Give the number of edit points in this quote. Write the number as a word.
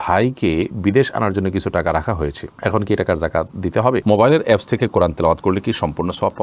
one